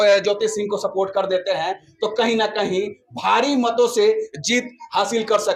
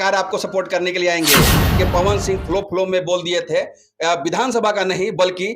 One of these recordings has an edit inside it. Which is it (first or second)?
second